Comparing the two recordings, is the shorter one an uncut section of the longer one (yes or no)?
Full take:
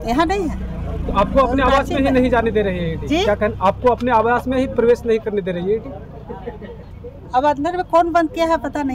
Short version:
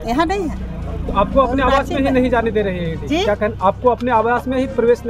yes